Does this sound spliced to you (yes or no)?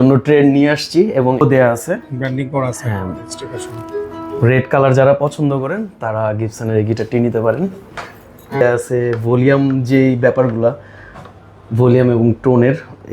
yes